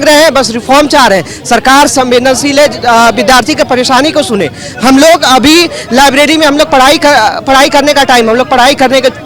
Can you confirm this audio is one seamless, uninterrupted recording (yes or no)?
yes